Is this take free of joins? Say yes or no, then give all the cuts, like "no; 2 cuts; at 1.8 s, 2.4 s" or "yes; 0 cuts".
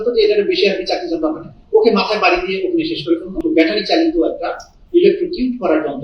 no; 1 cut; at 3.4 s